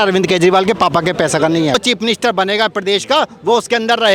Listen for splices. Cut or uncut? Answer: cut